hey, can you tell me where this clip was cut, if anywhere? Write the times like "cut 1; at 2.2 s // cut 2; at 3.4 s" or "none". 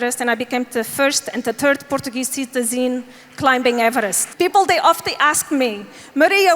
cut 1; at 4.2 s